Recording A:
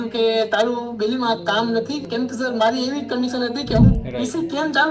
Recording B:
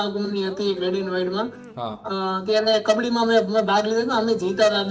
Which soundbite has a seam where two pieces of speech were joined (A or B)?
A